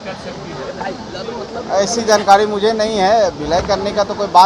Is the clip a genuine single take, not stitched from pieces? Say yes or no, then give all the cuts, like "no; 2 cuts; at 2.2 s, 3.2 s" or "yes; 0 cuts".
yes; 0 cuts